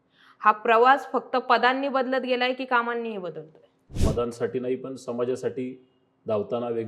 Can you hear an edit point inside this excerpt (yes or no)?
yes